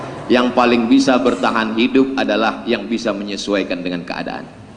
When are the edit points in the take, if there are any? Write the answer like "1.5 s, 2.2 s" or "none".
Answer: none